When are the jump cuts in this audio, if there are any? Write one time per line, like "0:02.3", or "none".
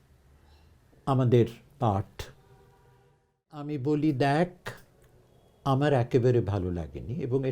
0:03.5